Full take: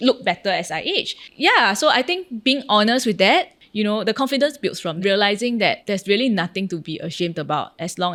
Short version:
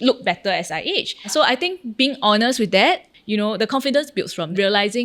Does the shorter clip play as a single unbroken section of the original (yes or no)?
no